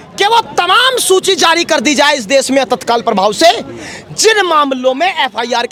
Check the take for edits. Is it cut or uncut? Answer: uncut